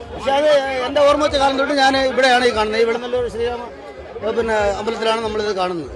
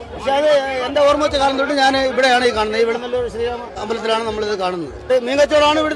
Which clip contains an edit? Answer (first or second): second